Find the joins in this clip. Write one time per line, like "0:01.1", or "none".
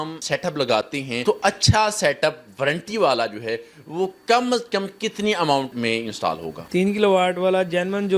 none